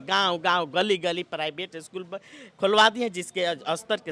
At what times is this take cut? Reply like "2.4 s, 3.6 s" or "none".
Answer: none